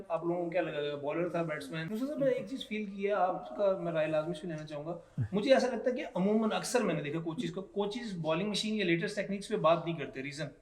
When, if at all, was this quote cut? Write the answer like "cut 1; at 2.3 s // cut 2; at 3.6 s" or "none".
cut 1; at 1.8 s